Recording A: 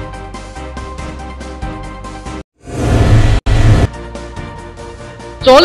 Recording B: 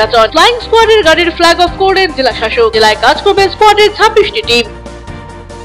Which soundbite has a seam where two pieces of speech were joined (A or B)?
A